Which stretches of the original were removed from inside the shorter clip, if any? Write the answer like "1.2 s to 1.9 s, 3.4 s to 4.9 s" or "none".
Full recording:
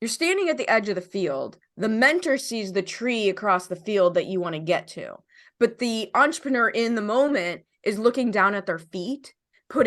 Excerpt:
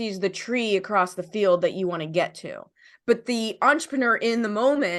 none